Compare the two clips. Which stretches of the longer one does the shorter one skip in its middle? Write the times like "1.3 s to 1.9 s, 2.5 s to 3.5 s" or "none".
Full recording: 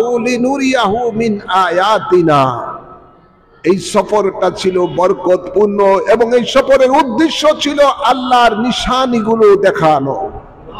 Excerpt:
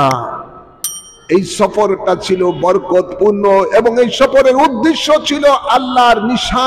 none